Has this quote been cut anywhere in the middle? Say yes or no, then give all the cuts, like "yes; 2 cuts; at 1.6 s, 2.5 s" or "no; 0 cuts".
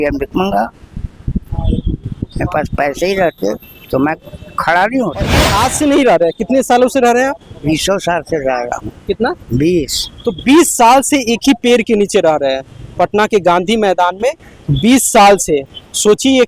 yes; 1 cut; at 5.5 s